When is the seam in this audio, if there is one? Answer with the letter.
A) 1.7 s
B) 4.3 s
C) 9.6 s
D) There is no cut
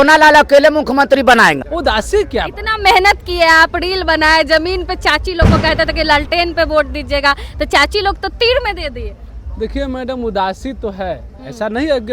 A